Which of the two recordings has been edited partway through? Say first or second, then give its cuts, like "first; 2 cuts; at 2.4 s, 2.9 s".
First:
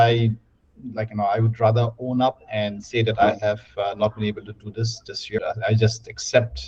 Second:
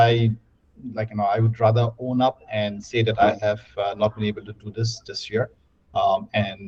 first; 1 cut; at 5.4 s